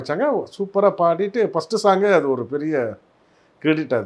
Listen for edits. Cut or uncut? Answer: uncut